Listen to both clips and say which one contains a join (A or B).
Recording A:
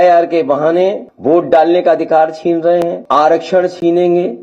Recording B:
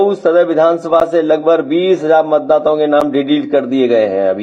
A